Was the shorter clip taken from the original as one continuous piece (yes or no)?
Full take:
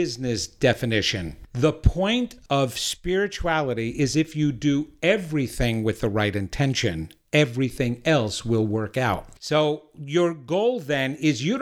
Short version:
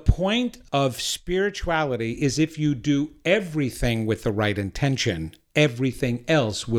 yes